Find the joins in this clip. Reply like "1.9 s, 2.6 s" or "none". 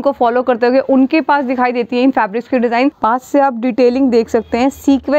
3.0 s